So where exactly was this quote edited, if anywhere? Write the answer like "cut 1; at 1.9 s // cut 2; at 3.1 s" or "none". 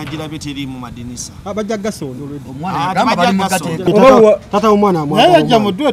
cut 1; at 3.8 s